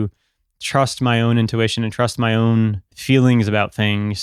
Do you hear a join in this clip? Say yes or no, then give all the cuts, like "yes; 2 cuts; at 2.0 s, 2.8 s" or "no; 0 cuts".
yes; 1 cut; at 2.9 s